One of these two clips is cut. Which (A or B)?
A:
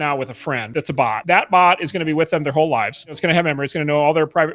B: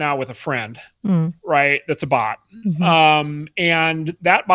A